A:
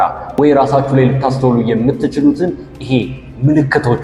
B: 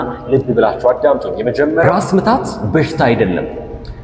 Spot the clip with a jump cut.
B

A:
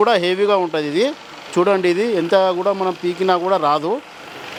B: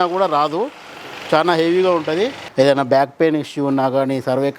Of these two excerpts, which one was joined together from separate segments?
B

